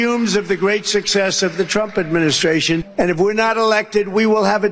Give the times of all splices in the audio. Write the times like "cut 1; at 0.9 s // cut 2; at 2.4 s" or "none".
cut 1; at 2.8 s